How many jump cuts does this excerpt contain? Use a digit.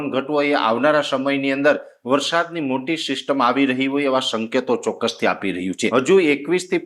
1